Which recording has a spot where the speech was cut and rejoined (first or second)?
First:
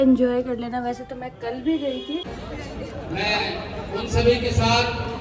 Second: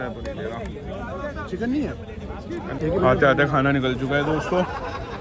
first